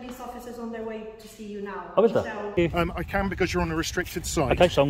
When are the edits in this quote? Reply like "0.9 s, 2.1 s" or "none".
2.6 s